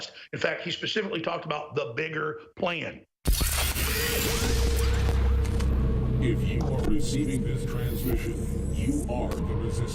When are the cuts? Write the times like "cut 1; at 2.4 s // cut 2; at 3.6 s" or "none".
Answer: cut 1; at 3.4 s